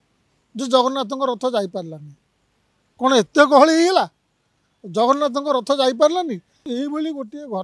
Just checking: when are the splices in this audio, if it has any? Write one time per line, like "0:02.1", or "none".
0:06.7

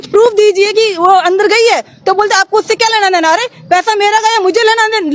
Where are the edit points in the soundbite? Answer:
none

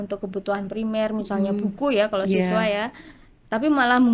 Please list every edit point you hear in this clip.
none

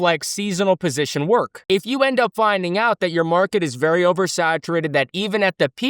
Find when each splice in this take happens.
0:01.6

